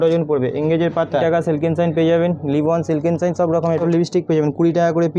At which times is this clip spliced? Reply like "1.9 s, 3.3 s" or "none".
1.2 s, 3.8 s